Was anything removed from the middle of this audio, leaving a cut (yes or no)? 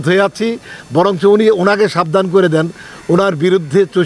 no